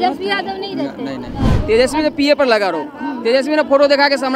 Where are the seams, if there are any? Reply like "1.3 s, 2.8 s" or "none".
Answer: 1.4 s